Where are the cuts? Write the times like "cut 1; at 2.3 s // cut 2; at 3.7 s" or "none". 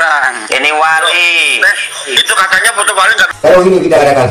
cut 1; at 3.3 s